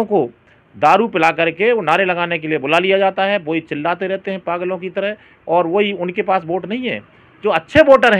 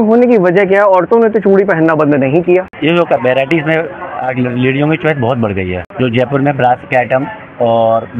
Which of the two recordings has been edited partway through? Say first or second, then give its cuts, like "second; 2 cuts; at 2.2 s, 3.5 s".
second; 2 cuts; at 2.7 s, 5.8 s